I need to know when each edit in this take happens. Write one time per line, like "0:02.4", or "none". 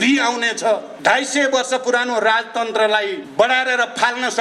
0:00.9
0:03.2

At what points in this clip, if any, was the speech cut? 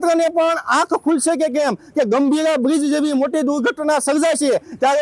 none

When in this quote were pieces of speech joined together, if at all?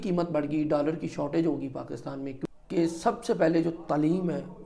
0:02.3

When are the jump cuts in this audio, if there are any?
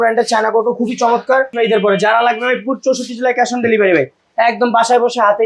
0:01.5

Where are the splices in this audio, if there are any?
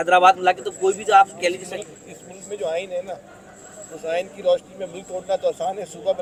none

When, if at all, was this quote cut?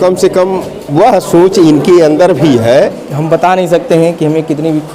0:03.0

